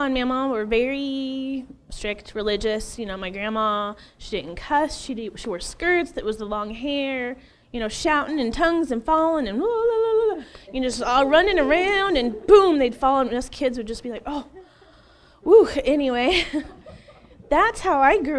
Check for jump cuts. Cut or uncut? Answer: uncut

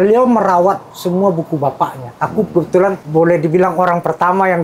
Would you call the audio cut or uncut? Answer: cut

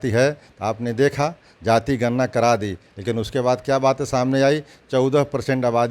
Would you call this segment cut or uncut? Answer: uncut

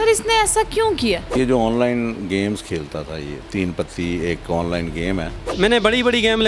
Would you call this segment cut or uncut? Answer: cut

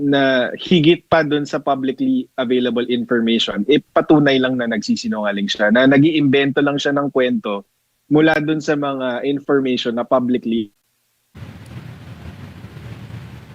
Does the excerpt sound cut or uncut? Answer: cut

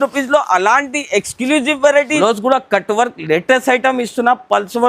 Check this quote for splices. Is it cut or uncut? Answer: cut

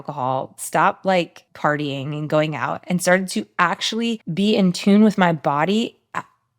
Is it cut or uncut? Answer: cut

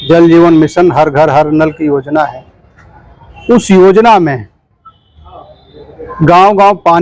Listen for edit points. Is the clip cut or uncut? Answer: uncut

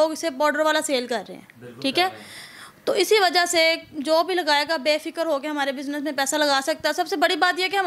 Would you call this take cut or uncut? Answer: uncut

